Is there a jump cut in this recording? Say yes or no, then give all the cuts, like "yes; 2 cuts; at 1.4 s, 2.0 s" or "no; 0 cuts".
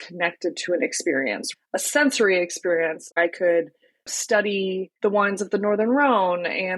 yes; 3 cuts; at 1.4 s, 3.1 s, 4.9 s